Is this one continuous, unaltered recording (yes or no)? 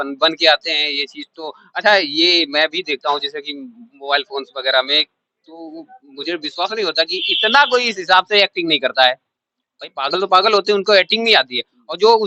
yes